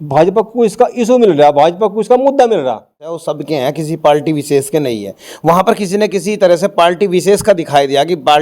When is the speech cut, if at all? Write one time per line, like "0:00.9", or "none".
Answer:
0:03.2